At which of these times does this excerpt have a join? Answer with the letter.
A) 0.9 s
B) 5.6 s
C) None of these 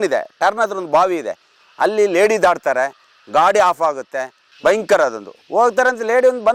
C